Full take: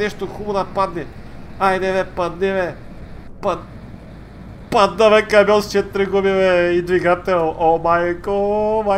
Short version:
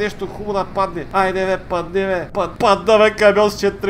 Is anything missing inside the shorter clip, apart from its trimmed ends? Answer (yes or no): yes